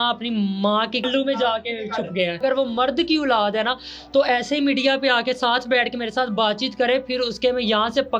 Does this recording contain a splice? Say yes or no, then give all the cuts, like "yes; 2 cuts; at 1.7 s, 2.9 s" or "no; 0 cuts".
yes; 2 cuts; at 1.1 s, 2.4 s